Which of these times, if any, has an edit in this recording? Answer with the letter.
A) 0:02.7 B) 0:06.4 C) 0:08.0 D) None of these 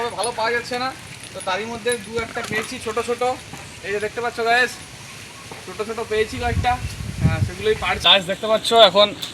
C